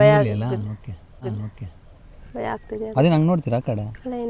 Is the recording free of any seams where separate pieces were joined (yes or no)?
no